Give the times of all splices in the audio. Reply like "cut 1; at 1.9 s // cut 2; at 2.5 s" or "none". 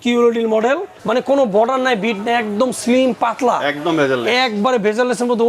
cut 1; at 0.9 s

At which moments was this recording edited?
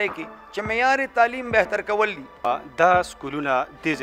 cut 1; at 2.5 s

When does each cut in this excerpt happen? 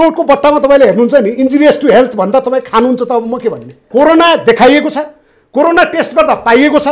cut 1; at 3.8 s

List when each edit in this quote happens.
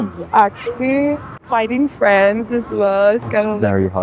none

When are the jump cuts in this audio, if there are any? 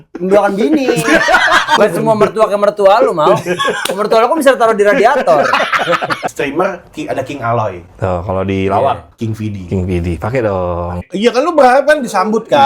cut 1; at 1.8 s // cut 2; at 6.3 s // cut 3; at 11.0 s

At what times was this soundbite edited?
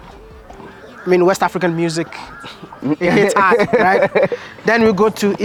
none

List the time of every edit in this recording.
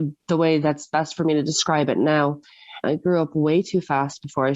cut 1; at 2.8 s

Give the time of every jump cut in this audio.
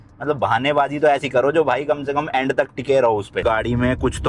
cut 1; at 3.3 s

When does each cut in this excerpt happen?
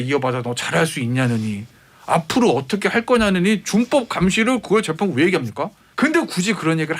cut 1; at 5.8 s

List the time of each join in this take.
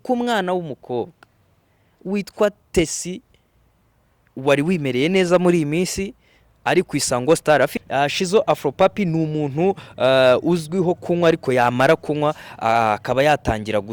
cut 1; at 7.8 s

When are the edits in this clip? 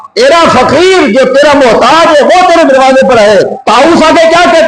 cut 1; at 3.6 s

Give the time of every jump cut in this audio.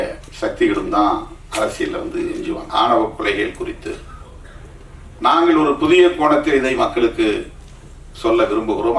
cut 1; at 2.6 s

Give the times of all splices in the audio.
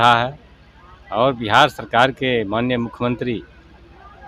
none

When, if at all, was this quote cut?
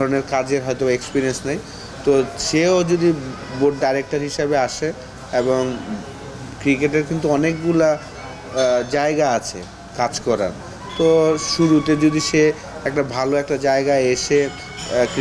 none

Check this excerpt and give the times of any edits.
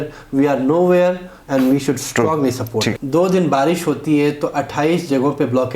cut 1; at 3.0 s

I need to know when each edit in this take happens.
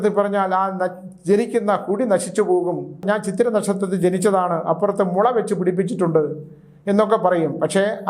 cut 1; at 3.0 s

